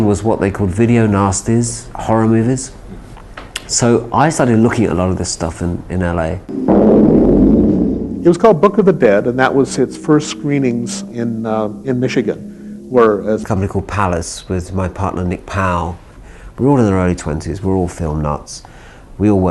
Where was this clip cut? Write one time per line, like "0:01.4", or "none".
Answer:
none